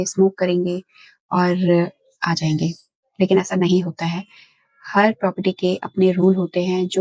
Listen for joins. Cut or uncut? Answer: uncut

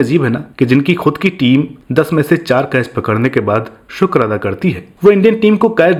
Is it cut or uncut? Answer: uncut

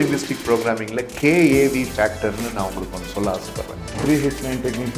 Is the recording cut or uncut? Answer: cut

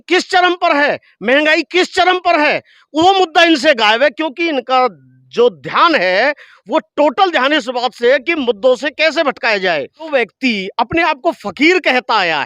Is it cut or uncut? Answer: cut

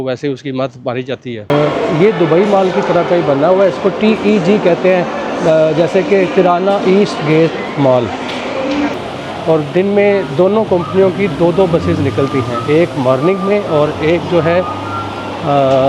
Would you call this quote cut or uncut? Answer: cut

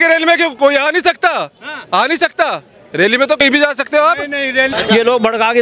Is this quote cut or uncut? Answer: cut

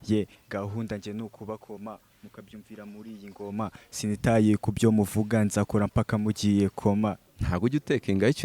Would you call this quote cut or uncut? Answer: cut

